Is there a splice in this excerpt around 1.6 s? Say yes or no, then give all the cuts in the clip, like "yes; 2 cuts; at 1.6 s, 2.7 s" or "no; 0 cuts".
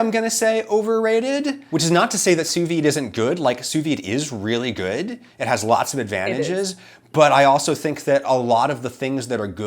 yes; 1 cut; at 1.6 s